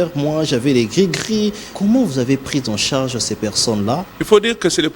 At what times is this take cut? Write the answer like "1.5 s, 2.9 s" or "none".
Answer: 1.7 s, 4.1 s